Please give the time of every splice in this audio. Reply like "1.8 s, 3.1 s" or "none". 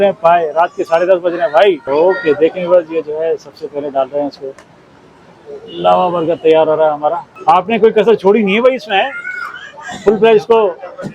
1.8 s, 7.3 s